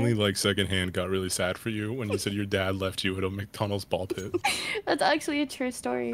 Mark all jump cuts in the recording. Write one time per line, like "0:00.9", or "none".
none